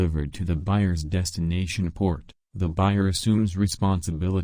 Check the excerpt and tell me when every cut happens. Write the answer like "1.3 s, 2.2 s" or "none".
3.0 s